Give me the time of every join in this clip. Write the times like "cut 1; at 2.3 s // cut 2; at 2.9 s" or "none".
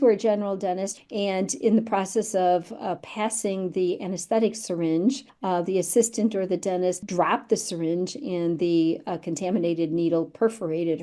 cut 1; at 0.9 s // cut 2; at 5.3 s // cut 3; at 7.0 s